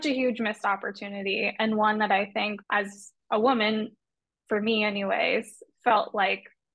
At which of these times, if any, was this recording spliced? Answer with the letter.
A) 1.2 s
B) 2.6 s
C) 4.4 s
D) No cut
B